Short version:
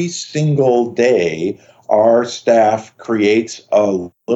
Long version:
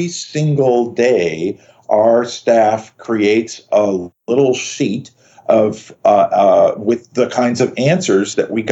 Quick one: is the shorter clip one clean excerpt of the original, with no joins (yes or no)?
yes